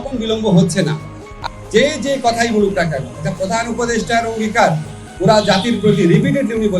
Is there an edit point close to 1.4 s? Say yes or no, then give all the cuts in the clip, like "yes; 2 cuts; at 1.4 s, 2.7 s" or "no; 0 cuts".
yes; 1 cut; at 1.4 s